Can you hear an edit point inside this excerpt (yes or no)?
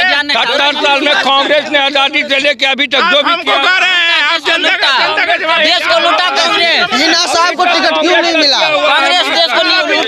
no